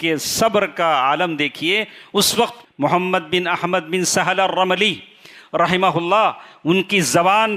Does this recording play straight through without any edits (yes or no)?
yes